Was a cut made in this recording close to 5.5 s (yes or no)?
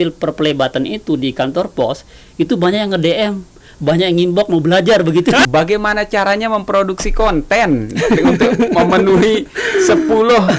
yes